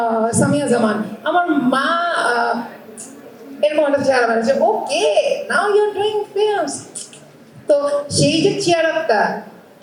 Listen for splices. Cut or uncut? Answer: uncut